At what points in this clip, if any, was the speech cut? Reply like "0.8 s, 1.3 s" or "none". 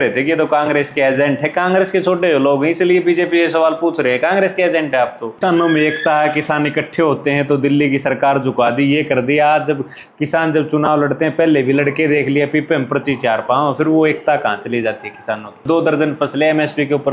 5.4 s, 15.6 s

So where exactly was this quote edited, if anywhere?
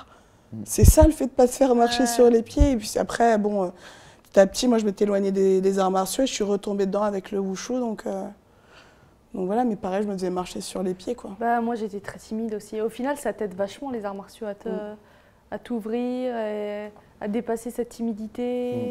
none

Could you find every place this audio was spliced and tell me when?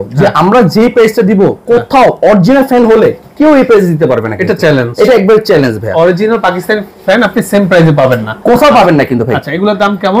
none

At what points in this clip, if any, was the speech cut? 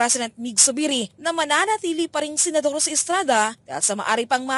none

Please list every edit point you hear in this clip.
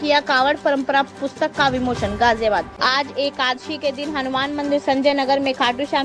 2.7 s

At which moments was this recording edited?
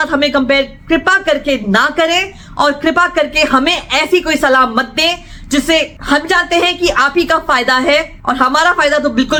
none

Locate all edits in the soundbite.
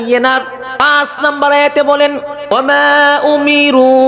0.8 s, 2.5 s

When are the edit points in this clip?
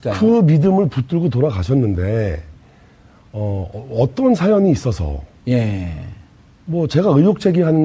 4.1 s

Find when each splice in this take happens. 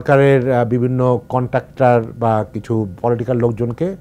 none

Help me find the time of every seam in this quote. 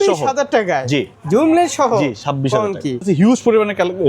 1.1 s, 3.0 s

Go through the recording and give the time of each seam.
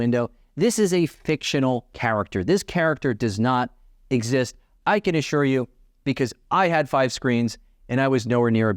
1.9 s

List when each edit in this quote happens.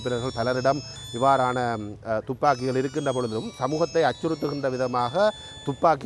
none

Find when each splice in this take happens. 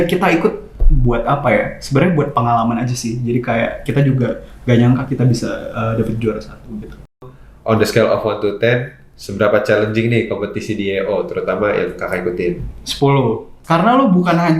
7.3 s, 13.5 s

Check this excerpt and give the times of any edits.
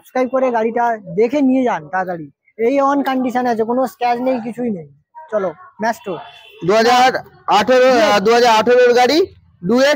none

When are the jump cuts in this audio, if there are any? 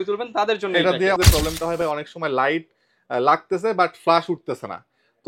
1.2 s

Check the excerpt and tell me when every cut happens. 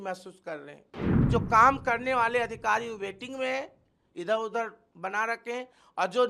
1.3 s

